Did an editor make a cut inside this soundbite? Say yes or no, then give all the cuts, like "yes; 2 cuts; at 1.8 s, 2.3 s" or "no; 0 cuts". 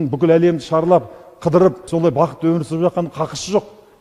yes; 1 cut; at 1.9 s